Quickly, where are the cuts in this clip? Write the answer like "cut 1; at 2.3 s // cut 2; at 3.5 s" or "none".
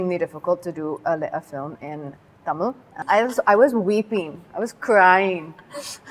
cut 1; at 3.0 s

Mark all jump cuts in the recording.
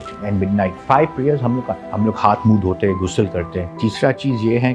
cut 1; at 1.8 s // cut 2; at 3.7 s

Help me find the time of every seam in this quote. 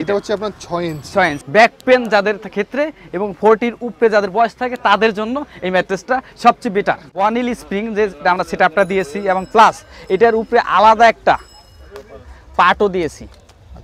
cut 1; at 1.4 s // cut 2; at 7.2 s

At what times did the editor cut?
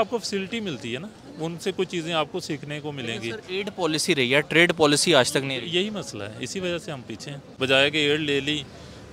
cut 1; at 7.4 s

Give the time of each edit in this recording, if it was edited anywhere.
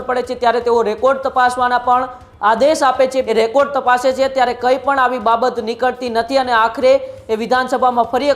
cut 1; at 3.2 s

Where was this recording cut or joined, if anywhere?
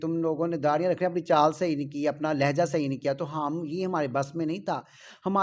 none

